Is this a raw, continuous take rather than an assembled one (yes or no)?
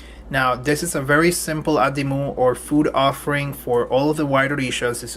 no